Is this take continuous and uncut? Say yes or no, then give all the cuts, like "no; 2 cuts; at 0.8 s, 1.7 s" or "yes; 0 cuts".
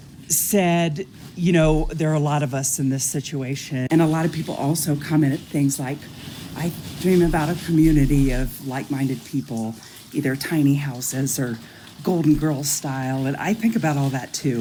yes; 0 cuts